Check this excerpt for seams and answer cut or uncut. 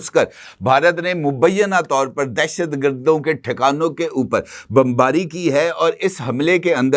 uncut